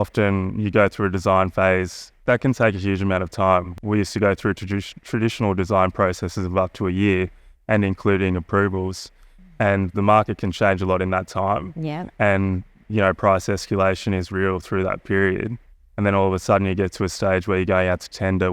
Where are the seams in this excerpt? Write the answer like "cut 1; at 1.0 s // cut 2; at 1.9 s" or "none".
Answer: cut 1; at 2.2 s // cut 2; at 3.7 s